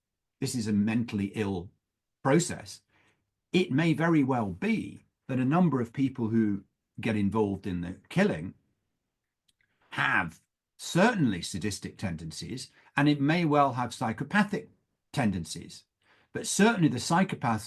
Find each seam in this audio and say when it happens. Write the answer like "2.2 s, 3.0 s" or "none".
none